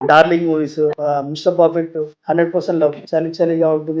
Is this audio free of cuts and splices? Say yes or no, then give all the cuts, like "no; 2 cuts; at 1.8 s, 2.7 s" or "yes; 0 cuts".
no; 3 cuts; at 0.9 s, 2.1 s, 3.0 s